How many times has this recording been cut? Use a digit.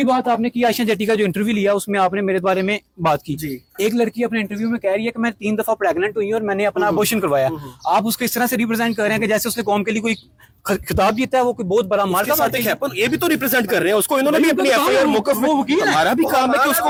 0